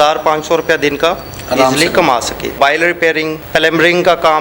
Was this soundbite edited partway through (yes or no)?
yes